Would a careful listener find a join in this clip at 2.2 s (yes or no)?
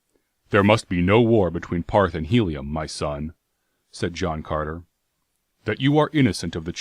yes